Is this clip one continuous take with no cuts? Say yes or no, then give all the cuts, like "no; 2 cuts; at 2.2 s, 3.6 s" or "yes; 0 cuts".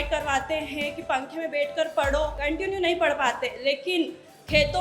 no; 1 cut; at 2.4 s